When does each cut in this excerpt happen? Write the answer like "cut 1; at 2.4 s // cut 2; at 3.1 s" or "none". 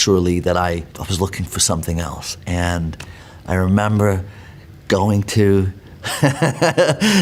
none